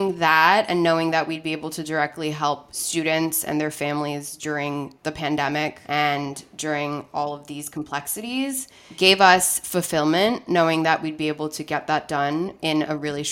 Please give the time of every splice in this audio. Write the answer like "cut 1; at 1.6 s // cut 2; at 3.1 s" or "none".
none